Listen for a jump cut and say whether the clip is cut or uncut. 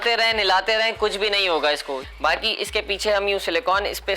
cut